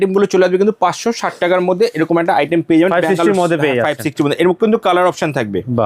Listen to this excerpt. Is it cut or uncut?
uncut